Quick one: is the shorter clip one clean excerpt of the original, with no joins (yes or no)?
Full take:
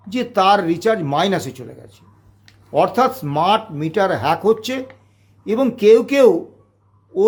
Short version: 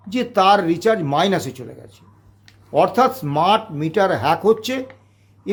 yes